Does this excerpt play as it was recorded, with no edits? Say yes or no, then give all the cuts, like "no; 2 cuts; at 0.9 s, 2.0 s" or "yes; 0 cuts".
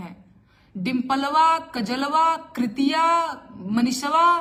yes; 0 cuts